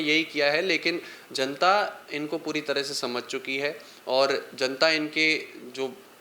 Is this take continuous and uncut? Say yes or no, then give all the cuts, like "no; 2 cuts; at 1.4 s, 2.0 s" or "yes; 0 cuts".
yes; 0 cuts